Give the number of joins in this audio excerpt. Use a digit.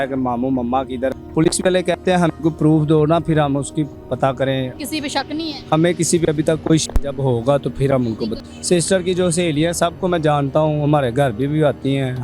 3